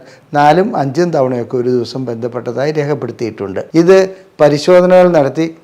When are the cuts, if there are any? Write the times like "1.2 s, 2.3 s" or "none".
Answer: 3.6 s

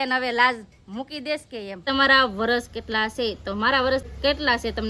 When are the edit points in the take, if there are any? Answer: 1.8 s, 4.1 s

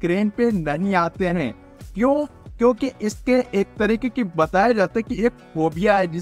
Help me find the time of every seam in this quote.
none

